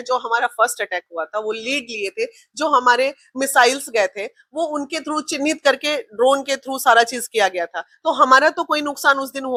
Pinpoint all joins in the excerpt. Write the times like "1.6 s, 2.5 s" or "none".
none